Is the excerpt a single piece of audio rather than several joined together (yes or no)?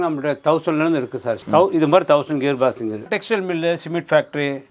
no